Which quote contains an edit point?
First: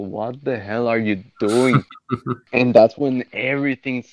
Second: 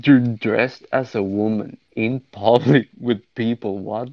second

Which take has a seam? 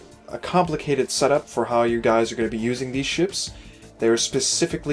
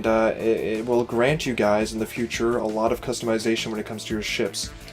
second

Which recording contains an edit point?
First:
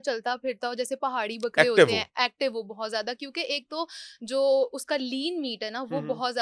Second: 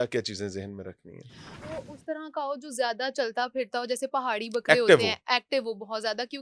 second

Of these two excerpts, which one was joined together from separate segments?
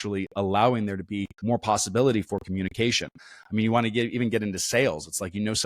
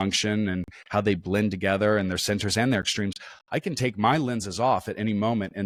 first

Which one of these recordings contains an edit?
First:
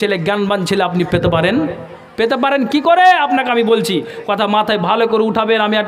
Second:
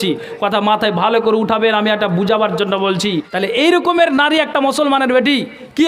second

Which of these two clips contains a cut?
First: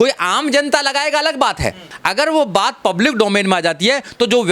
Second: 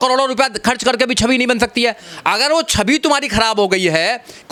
first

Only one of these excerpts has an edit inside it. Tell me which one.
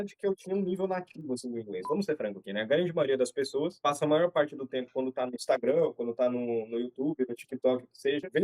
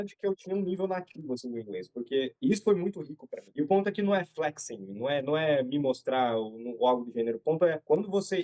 first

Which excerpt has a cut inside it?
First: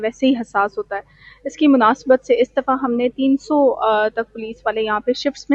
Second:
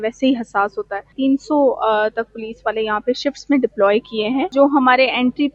second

